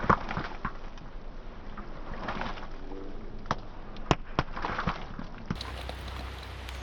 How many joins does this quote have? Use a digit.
0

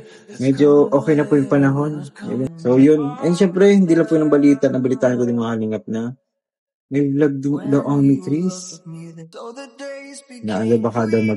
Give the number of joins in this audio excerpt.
2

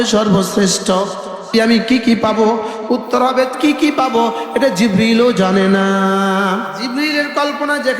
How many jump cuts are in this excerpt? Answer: 3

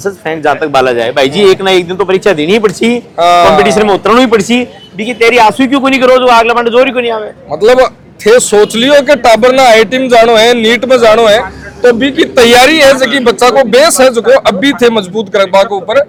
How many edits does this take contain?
0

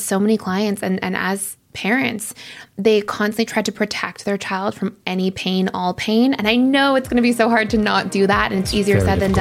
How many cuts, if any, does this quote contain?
0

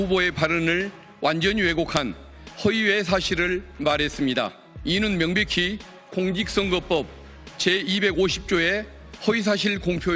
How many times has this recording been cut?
1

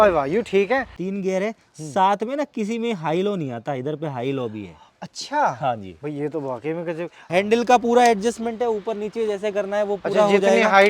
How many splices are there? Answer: 2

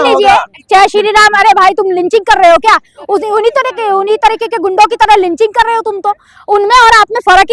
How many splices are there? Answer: 0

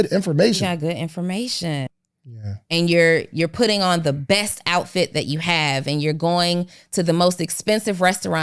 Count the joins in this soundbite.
1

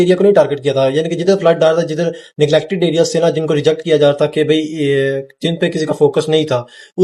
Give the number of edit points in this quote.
0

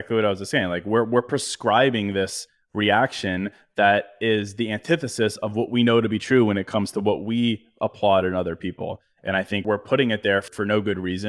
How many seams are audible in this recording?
2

